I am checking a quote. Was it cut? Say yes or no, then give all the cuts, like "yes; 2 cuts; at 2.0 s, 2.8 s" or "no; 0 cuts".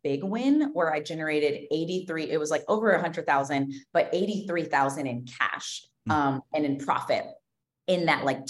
no; 0 cuts